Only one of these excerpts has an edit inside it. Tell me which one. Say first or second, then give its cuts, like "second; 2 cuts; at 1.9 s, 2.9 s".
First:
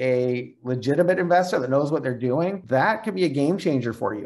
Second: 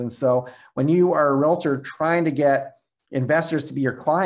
first; 1 cut; at 2.6 s